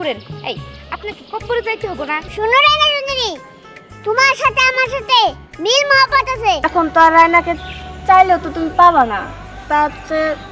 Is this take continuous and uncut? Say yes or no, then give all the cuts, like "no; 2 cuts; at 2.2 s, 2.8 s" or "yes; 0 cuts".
no; 2 cuts; at 2.3 s, 6.7 s